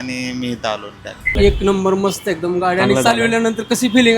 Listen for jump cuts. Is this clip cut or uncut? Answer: cut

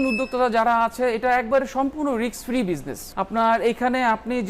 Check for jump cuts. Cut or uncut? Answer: cut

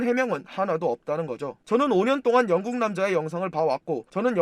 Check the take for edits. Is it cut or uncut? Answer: cut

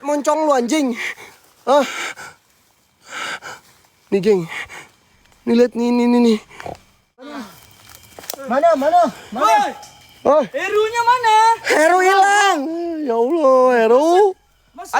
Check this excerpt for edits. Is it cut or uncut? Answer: cut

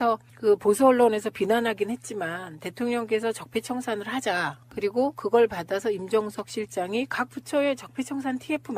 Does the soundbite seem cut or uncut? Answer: uncut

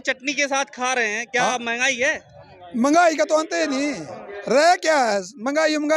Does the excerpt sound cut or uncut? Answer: uncut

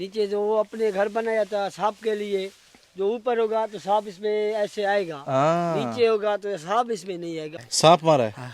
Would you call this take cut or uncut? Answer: cut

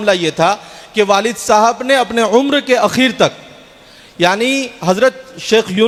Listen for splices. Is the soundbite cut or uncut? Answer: uncut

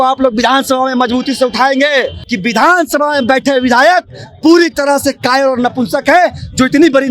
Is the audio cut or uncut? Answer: cut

